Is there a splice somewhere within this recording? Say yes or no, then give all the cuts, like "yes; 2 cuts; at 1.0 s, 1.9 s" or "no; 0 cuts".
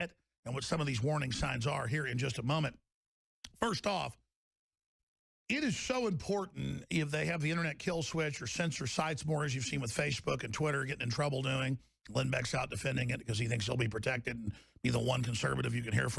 yes; 1 cut; at 8.2 s